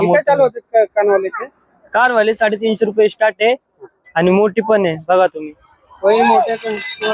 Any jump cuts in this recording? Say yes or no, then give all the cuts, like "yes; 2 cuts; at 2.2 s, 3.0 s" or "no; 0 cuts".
no; 0 cuts